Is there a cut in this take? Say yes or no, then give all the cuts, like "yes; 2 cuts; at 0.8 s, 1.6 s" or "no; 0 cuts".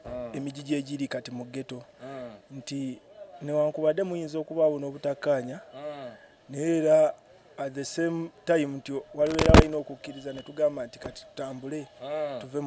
no; 0 cuts